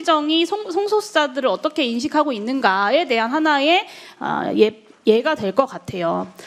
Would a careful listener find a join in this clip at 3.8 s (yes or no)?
no